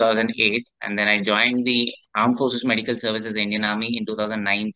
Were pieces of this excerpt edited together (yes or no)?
yes